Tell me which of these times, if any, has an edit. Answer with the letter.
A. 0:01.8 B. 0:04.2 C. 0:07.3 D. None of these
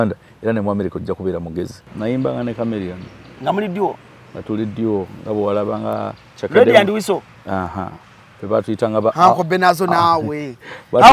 A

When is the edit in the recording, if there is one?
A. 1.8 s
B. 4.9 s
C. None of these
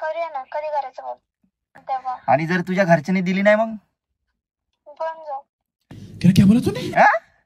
A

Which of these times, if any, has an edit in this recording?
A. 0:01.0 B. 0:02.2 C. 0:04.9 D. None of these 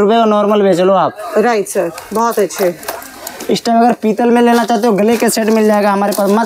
D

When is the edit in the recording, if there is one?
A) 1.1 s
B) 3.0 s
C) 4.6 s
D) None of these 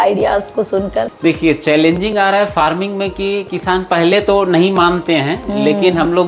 A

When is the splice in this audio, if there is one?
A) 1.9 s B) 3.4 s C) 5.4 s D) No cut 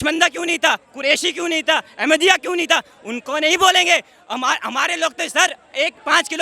D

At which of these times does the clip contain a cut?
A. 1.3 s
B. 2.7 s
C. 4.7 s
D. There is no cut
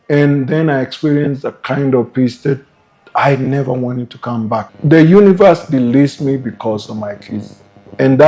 C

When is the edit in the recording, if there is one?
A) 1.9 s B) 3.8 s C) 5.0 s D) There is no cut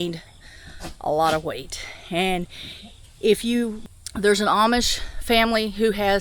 B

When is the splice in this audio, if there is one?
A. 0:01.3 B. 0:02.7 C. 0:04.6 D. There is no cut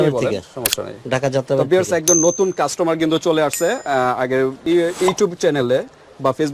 C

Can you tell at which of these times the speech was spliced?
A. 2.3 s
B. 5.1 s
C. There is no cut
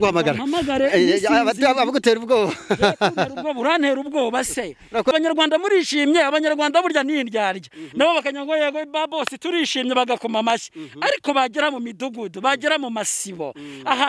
B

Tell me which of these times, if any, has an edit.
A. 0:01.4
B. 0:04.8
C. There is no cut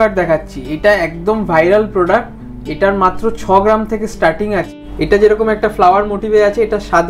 B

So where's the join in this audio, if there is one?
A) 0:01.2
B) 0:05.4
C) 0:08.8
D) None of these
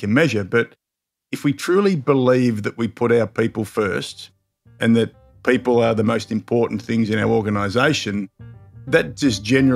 C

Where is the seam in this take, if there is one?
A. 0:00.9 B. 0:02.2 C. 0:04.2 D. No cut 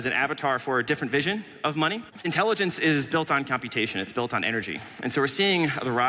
B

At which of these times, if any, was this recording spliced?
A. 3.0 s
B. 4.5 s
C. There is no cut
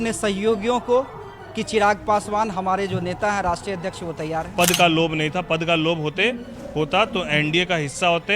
B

